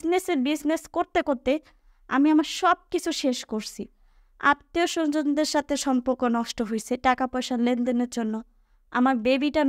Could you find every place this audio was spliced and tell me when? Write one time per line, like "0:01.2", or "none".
none

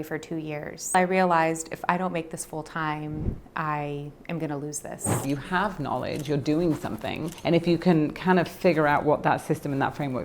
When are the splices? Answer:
0:00.9
0:05.2
0:07.3

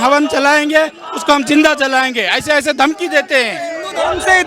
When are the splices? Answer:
none

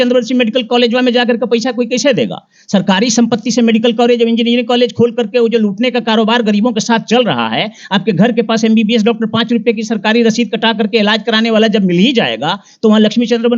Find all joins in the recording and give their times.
none

